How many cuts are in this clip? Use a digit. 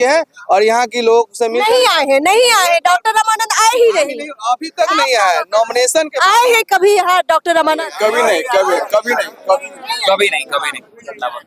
0